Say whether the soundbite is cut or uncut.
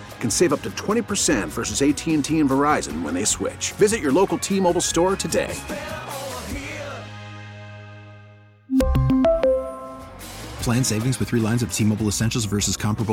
uncut